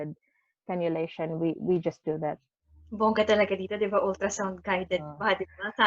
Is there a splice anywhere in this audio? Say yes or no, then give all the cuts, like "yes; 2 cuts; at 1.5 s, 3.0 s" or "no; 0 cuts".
yes; 1 cut; at 2.5 s